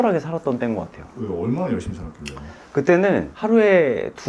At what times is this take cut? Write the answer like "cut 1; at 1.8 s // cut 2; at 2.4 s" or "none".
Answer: none